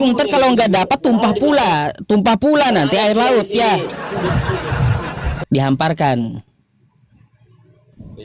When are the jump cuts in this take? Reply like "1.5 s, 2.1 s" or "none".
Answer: 5.4 s